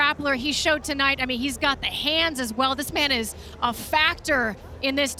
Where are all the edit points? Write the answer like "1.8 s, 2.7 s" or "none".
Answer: none